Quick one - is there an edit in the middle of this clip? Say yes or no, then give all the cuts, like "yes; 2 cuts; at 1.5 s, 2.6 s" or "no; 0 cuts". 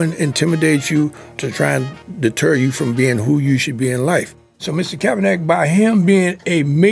yes; 1 cut; at 4.5 s